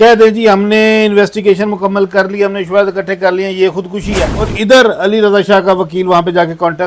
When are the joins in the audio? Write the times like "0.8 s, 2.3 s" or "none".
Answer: 4.5 s

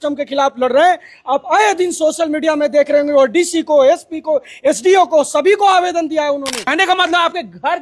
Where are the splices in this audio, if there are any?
6.6 s

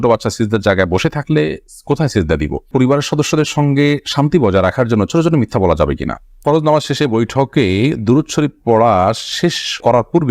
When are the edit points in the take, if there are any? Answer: 2.6 s, 6.3 s

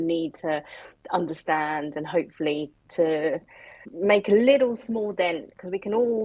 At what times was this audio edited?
none

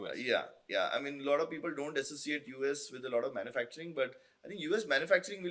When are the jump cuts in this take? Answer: none

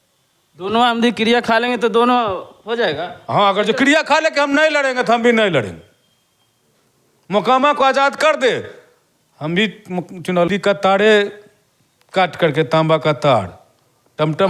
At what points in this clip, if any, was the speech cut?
10.5 s

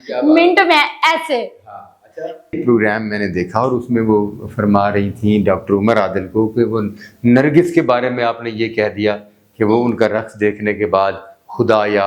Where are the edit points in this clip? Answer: none

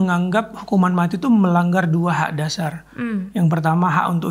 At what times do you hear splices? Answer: none

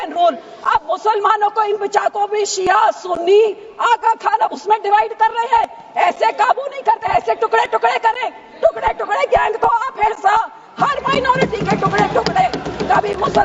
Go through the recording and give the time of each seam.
none

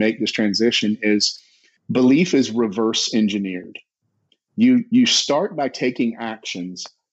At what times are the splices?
none

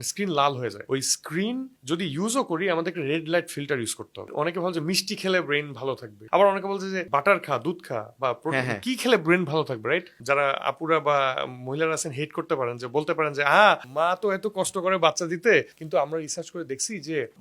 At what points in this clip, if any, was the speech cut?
0.8 s, 4.3 s, 6.1 s, 7.0 s, 10.1 s

